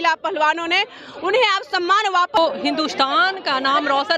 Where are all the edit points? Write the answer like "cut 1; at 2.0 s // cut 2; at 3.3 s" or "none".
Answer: cut 1; at 2.4 s